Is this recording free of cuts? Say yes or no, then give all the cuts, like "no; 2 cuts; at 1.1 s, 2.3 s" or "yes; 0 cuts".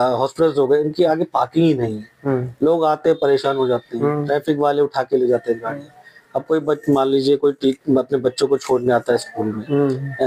yes; 0 cuts